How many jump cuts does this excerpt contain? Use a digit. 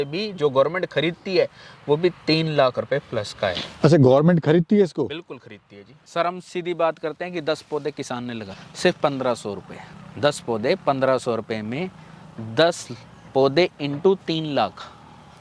1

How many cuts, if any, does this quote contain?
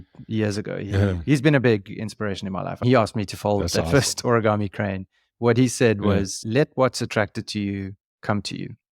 0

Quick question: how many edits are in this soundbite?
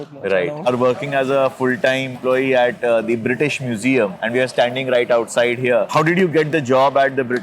3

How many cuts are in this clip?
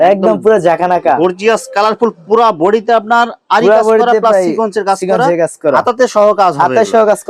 0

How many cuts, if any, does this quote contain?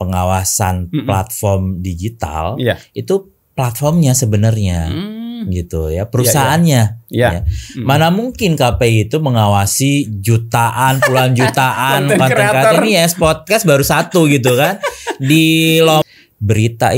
1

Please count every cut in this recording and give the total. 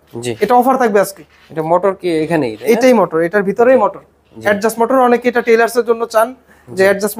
0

